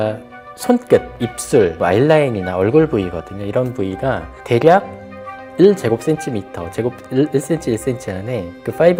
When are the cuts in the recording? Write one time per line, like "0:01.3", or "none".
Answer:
none